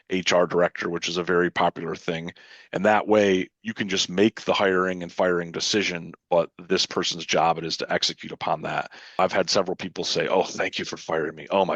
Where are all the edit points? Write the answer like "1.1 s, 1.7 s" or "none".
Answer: 9.2 s